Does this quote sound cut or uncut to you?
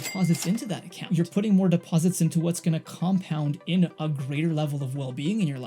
uncut